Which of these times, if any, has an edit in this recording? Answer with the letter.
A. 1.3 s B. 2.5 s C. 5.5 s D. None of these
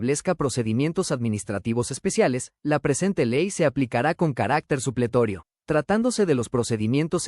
C